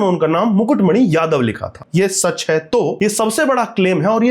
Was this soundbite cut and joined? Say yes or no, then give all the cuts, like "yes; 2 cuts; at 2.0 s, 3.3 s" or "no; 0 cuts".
yes; 2 cuts; at 1.8 s, 2.9 s